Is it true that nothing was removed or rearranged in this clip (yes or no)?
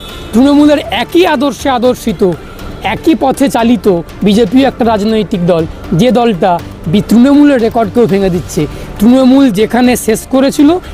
yes